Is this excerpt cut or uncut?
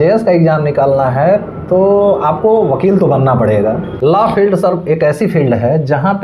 cut